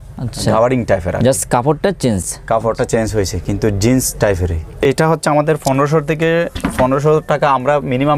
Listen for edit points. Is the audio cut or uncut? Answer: uncut